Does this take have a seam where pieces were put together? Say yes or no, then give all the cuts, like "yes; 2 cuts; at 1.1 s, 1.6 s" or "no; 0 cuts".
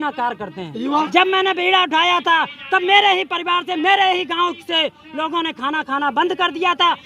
yes; 1 cut; at 1.1 s